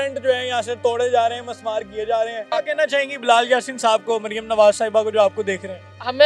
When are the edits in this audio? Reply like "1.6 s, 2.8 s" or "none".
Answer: 2.4 s